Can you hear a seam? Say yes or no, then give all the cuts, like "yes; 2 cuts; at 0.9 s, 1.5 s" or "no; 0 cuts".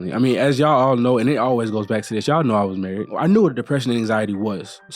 yes; 1 cut; at 3.1 s